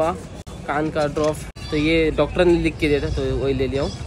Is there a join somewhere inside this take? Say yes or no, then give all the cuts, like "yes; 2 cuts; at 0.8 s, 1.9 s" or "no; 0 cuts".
no; 0 cuts